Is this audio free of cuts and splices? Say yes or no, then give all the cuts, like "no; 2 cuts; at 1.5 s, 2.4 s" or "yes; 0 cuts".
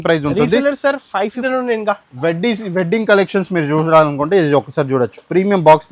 no; 1 cut; at 1.4 s